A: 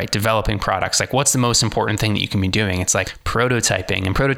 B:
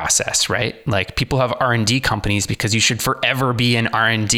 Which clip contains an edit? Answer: A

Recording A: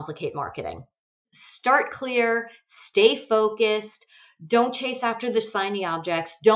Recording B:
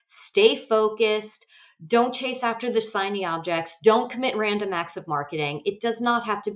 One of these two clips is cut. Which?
A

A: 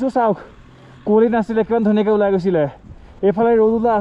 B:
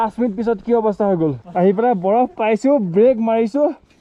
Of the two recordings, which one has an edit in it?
B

